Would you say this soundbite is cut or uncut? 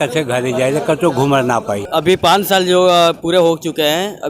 cut